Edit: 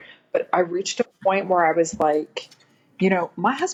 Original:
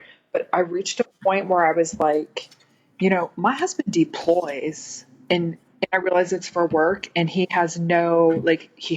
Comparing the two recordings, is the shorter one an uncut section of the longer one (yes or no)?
yes